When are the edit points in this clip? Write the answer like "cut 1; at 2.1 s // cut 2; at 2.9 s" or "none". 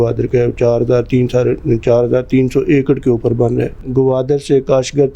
cut 1; at 3.8 s